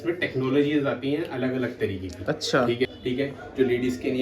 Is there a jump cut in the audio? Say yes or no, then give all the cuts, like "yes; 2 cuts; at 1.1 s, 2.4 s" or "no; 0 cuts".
yes; 1 cut; at 2.9 s